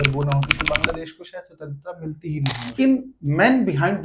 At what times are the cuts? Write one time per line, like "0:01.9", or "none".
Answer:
0:02.8